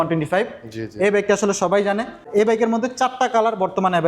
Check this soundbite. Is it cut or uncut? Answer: cut